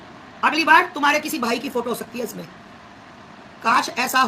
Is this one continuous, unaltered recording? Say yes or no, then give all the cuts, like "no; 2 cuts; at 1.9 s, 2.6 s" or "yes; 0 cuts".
yes; 0 cuts